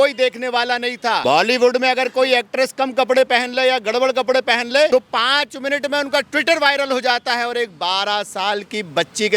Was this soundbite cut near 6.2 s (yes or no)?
no